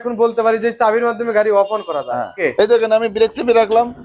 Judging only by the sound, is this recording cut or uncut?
cut